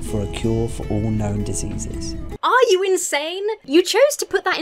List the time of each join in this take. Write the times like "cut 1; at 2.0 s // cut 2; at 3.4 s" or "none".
cut 1; at 2.3 s // cut 2; at 3.6 s